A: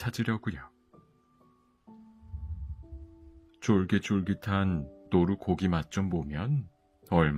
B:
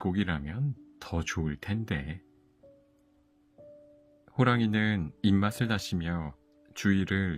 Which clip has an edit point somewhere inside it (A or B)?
B